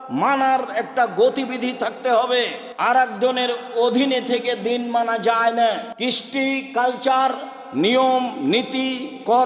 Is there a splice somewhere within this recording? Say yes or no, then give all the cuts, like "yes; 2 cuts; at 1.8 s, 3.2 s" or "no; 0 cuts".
yes; 2 cuts; at 2.6 s, 5.9 s